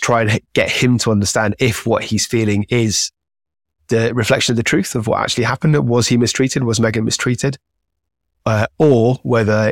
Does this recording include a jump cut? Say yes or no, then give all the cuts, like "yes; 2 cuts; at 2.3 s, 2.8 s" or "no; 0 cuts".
no; 0 cuts